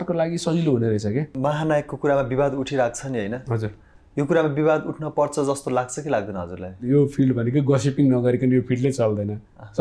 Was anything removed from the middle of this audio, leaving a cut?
yes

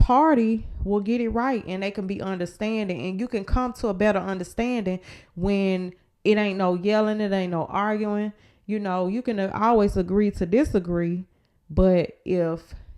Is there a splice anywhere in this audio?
no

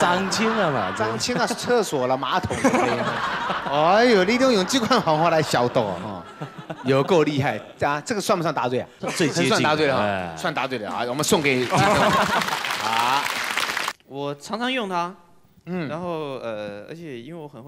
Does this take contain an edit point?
yes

